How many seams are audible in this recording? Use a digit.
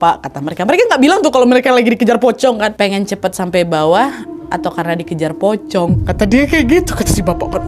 1